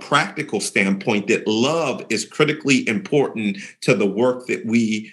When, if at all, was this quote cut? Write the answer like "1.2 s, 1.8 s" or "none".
none